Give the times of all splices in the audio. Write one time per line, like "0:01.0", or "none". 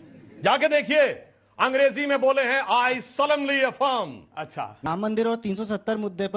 0:04.9